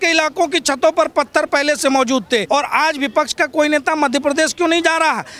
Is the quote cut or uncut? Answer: cut